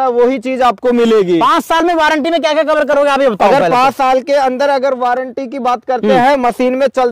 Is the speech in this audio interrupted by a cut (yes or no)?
no